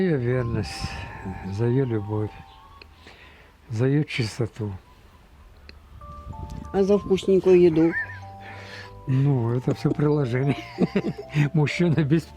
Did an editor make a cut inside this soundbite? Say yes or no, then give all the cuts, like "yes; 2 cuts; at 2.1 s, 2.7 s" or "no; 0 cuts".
no; 0 cuts